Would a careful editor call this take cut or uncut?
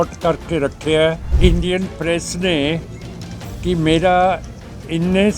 cut